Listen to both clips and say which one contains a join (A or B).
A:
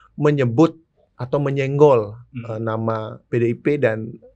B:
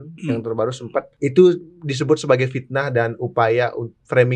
B